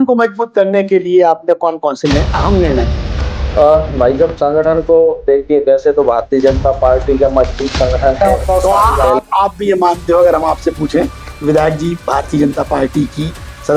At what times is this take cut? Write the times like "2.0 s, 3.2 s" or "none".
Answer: 8.2 s